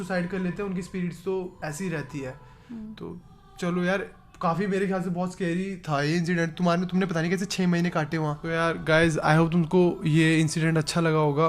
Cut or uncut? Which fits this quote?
uncut